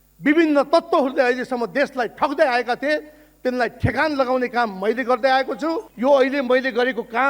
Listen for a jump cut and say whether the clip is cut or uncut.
cut